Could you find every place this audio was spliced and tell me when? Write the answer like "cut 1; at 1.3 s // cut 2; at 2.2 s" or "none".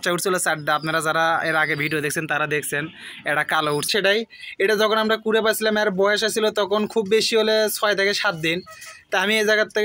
cut 1; at 3.9 s